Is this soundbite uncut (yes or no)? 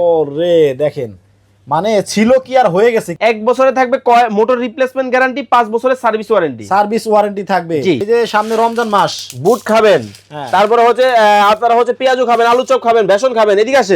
no